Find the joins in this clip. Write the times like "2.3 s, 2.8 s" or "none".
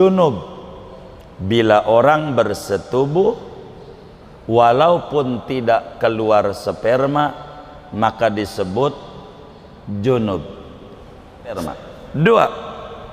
11.6 s